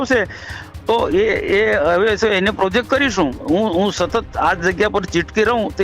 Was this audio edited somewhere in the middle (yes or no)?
yes